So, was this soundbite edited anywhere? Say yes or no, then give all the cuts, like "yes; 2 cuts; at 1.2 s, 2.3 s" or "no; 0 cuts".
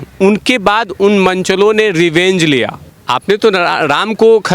yes; 1 cut; at 2.9 s